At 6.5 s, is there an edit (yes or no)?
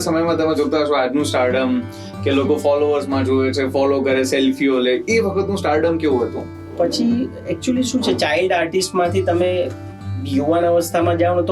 yes